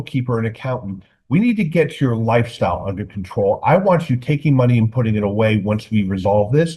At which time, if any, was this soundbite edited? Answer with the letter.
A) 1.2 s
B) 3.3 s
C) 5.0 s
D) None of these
D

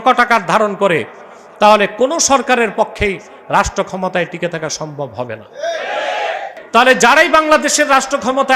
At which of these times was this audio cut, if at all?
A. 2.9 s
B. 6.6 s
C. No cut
B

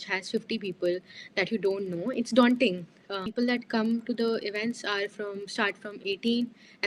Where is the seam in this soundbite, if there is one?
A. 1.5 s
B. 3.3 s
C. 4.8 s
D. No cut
B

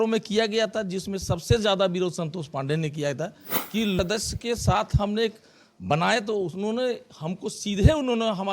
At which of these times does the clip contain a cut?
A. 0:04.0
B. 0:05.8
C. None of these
A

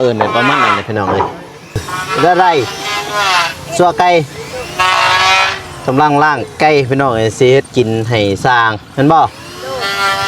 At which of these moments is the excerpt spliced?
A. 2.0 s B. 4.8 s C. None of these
A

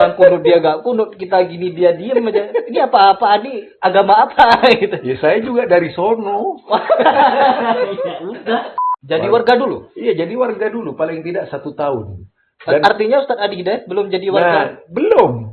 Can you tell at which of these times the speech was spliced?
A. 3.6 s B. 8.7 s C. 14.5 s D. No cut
B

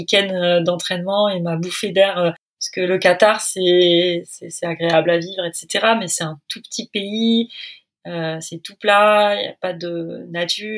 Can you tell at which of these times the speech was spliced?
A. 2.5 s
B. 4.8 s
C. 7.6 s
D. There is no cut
D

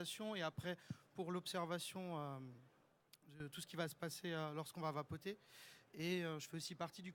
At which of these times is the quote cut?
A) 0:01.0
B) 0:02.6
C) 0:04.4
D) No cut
C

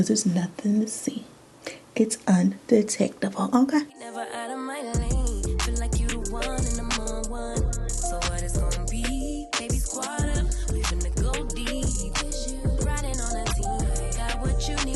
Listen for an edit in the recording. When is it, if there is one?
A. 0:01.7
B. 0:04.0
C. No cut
B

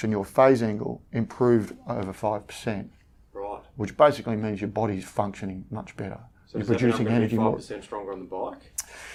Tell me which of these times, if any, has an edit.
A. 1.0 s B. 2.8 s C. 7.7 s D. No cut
D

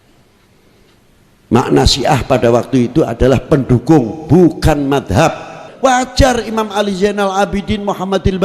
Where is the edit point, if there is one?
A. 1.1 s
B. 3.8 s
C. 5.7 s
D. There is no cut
C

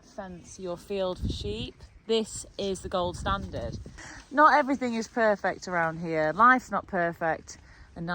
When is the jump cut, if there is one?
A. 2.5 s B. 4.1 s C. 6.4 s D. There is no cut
B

